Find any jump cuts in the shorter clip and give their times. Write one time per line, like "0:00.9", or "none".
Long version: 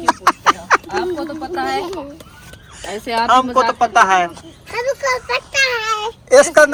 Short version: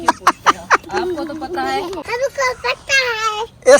0:02.0